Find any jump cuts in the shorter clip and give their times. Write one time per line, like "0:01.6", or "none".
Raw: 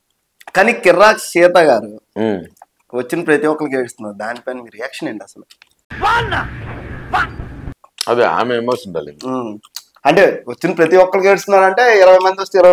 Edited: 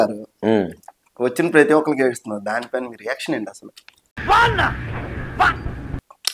none

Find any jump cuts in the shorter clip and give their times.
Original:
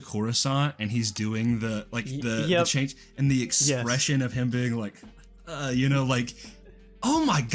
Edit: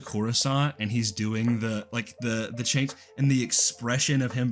none

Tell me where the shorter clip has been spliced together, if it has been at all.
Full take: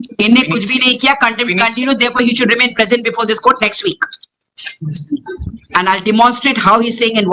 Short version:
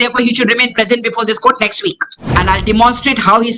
0:02.1

